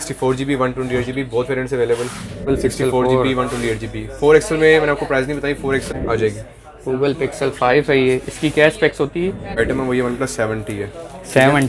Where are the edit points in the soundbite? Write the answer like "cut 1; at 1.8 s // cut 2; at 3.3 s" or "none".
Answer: cut 1; at 2.5 s // cut 2; at 5.9 s // cut 3; at 9.6 s